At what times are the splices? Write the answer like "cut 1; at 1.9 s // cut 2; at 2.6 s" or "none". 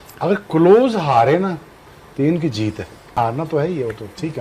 cut 1; at 3.2 s